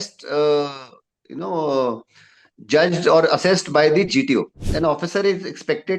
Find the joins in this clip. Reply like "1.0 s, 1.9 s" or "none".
4.6 s